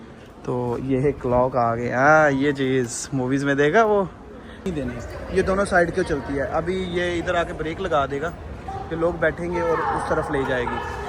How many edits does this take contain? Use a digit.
1